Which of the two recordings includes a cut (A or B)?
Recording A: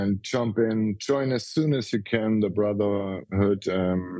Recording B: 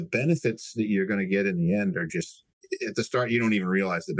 B